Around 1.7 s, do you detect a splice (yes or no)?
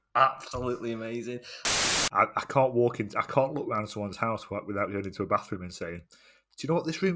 yes